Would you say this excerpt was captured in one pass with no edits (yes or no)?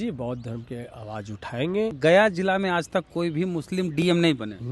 no